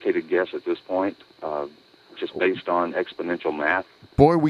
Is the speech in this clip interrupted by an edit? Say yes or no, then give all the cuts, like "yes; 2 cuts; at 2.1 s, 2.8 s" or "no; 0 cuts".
no; 0 cuts